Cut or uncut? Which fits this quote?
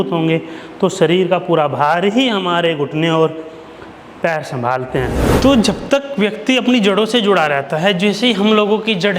cut